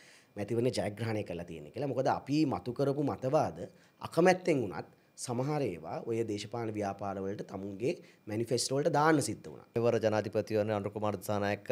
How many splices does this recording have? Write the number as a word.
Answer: one